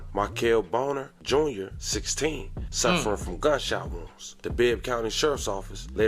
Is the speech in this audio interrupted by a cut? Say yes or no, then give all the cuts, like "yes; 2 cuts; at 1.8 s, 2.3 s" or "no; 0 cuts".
no; 0 cuts